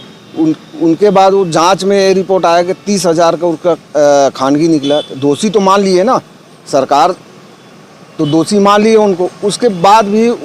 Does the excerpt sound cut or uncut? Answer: uncut